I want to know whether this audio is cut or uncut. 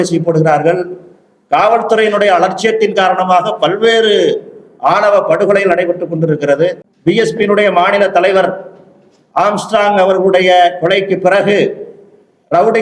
cut